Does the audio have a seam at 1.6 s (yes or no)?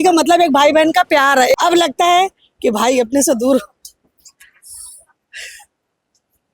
yes